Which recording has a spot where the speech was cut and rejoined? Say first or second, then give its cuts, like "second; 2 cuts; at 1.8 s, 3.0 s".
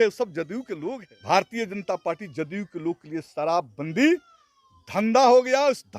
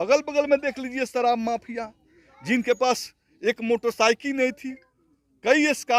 first; 1 cut; at 1.1 s